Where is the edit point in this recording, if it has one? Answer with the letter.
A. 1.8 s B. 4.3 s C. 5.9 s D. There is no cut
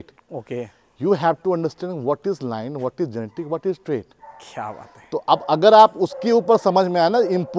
D